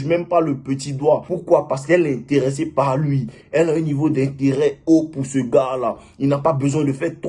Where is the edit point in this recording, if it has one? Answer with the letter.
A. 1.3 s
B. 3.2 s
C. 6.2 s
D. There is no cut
A